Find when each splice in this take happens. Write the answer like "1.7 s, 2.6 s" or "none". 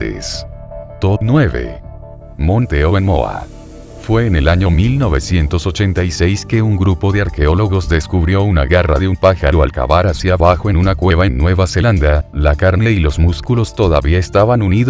7.8 s